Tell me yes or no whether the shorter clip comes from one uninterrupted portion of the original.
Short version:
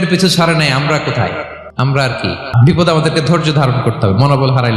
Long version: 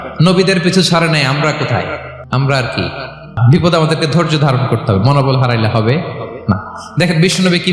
no